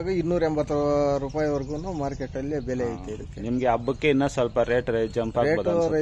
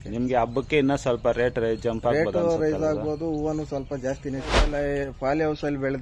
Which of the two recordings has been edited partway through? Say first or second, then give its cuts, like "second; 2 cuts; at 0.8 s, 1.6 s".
second; 1 cut; at 4.6 s